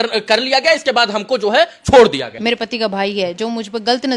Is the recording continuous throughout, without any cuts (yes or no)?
no